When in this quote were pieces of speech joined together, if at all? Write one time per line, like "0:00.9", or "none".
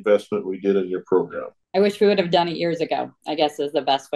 0:01.6
0:03.2